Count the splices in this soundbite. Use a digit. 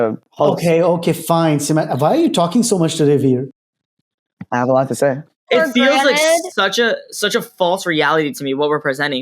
2